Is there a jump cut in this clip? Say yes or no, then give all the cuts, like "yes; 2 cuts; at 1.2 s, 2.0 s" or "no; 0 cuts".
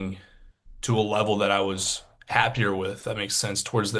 yes; 1 cut; at 3.0 s